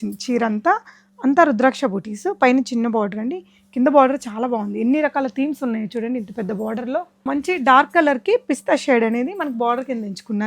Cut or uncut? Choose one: cut